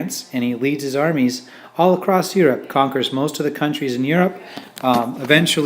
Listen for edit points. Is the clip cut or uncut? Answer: cut